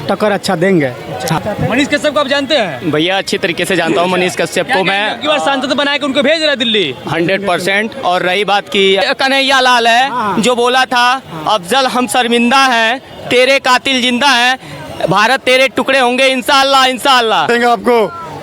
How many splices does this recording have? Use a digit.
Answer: 3